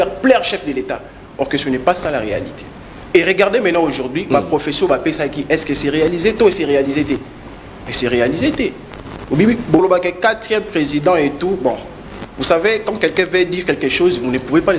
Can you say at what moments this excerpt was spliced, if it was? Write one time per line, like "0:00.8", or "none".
0:09.8